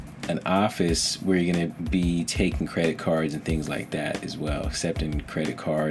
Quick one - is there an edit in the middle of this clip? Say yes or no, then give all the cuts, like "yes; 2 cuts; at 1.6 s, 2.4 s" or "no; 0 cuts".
no; 0 cuts